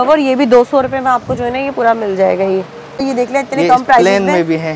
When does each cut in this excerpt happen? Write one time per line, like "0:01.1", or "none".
0:03.0